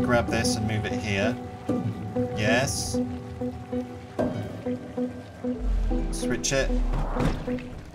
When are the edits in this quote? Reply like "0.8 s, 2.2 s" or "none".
none